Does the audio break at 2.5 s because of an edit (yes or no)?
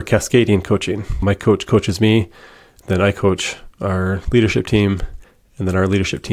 no